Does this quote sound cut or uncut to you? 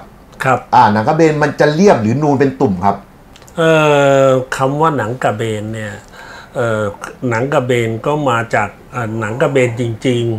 uncut